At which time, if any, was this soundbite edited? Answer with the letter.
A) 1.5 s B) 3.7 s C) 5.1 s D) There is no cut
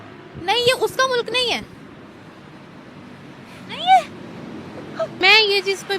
C